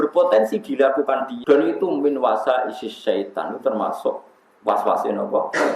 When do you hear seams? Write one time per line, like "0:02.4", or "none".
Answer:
0:01.3